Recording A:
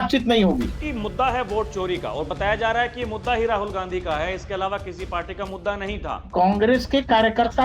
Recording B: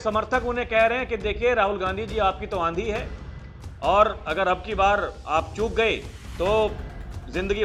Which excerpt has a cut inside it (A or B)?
A